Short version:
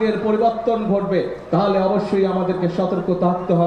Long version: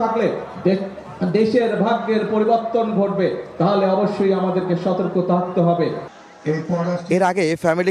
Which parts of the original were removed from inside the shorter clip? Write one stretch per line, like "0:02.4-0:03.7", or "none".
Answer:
none